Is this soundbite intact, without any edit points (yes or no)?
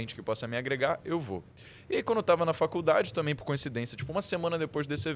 yes